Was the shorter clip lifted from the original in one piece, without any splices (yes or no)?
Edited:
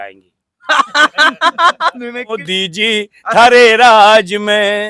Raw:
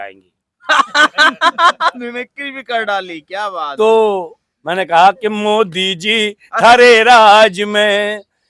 no